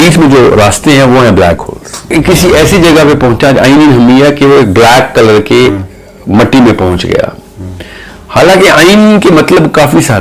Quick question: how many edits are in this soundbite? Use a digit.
1